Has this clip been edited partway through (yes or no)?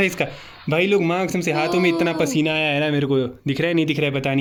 no